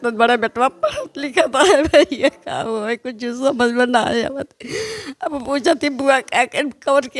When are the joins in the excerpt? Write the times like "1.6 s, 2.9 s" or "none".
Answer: none